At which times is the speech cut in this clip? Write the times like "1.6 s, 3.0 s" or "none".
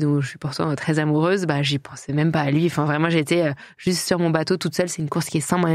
none